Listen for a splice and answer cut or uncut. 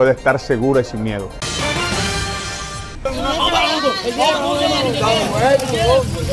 cut